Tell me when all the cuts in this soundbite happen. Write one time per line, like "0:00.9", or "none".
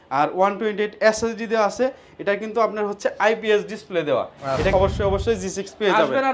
0:04.7